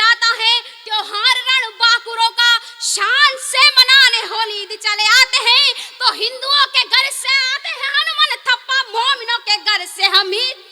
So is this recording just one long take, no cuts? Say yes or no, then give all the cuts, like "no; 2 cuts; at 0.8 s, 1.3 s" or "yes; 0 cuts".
yes; 0 cuts